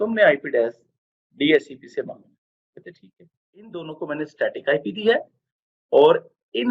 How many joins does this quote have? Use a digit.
1